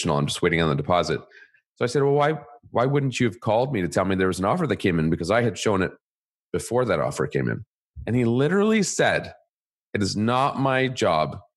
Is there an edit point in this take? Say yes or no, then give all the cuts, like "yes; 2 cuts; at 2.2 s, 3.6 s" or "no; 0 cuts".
yes; 1 cut; at 7.9 s